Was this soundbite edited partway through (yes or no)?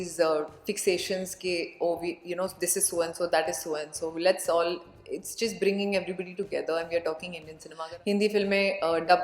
yes